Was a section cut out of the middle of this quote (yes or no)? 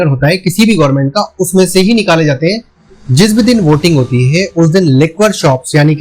yes